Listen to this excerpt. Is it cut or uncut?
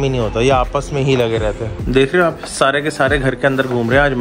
cut